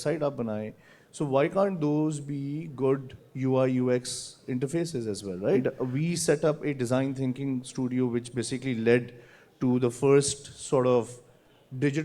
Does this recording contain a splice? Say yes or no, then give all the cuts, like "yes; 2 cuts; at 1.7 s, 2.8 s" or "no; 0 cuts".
yes; 1 cut; at 5.6 s